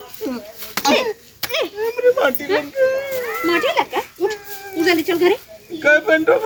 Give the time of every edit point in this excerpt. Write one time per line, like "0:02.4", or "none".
none